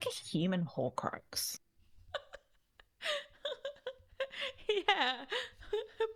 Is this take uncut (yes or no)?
yes